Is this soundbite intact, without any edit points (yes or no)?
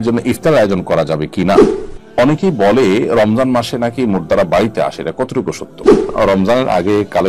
no